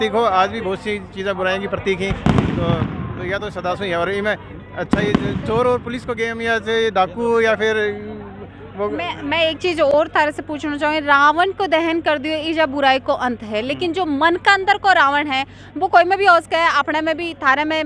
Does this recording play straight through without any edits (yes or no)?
yes